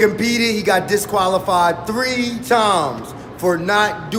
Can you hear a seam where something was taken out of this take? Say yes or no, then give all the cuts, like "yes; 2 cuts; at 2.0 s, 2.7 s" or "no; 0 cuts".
no; 0 cuts